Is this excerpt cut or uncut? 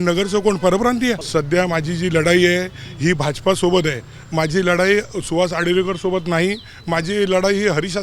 cut